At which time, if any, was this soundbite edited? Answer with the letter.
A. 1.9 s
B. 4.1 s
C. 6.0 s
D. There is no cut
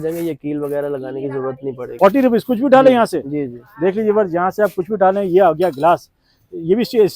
A